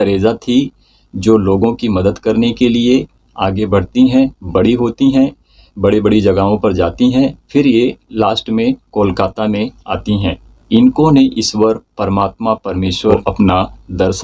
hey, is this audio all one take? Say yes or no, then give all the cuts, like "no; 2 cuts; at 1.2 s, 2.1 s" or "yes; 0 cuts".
no; 2 cuts; at 10.5 s, 13.1 s